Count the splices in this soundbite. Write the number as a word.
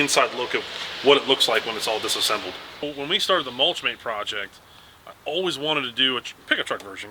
one